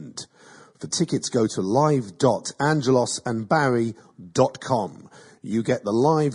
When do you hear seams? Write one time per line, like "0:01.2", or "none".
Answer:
0:02.1